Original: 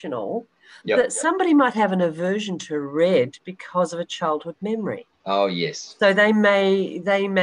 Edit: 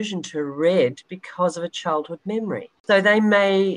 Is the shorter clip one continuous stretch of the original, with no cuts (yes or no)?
no